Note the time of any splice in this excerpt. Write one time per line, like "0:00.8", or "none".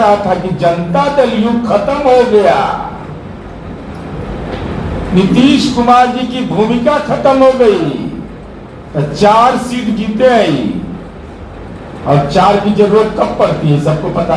none